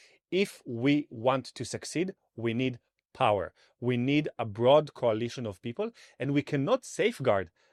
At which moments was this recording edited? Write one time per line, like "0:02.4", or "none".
none